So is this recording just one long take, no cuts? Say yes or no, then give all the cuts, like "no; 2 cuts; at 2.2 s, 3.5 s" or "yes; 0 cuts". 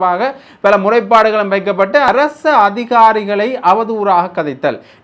no; 1 cut; at 2.1 s